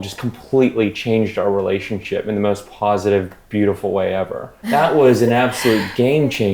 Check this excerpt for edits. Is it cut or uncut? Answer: cut